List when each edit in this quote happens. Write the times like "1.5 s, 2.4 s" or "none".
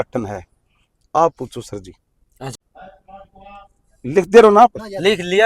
2.5 s